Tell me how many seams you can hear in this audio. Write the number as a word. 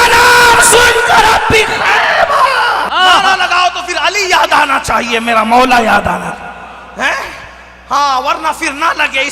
one